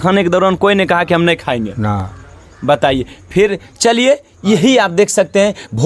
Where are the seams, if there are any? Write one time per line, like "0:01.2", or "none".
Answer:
none